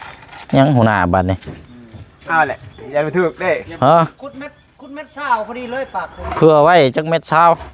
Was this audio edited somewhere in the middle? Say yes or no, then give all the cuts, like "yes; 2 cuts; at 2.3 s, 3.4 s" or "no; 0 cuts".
no; 0 cuts